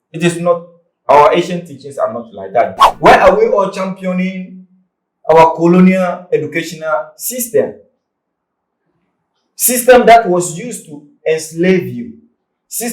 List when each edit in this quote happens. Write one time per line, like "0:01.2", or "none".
0:02.8